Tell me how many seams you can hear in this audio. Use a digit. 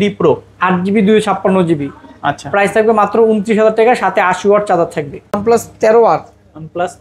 1